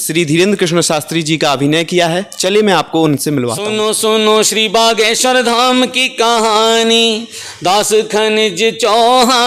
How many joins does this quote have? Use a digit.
1